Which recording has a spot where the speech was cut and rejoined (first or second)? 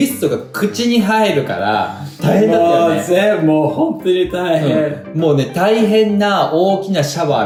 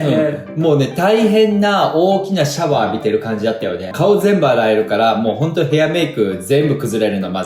second